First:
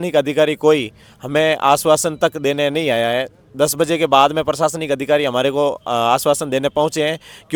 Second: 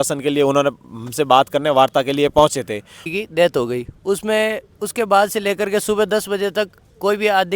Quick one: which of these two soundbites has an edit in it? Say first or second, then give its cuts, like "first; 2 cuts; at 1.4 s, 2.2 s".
second; 1 cut; at 3.0 s